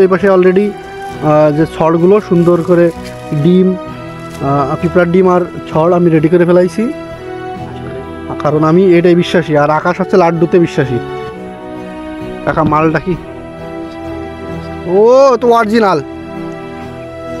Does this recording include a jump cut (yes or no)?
yes